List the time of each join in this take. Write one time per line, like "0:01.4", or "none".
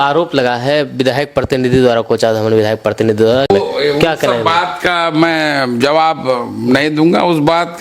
none